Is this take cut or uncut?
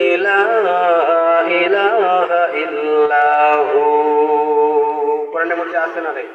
uncut